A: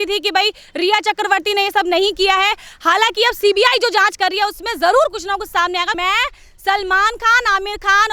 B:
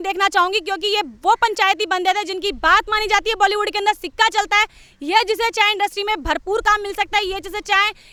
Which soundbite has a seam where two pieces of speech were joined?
A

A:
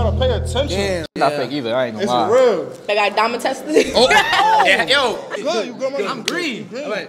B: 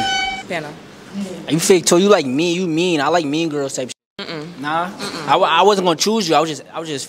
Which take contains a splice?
A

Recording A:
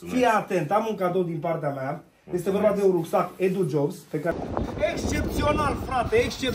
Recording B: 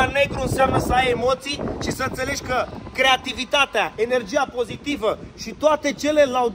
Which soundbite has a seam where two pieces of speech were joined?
A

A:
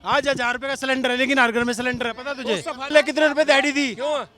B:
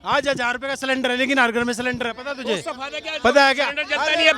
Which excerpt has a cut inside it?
A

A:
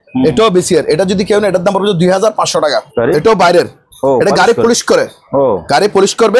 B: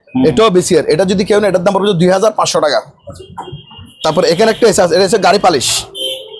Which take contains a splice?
A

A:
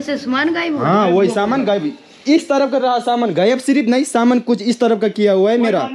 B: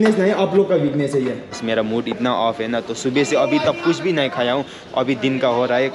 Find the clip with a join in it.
B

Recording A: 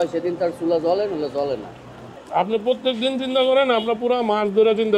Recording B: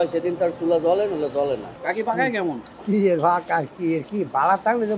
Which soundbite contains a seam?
B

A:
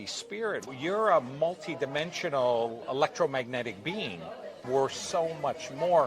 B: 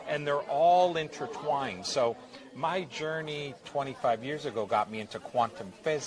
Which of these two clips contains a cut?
A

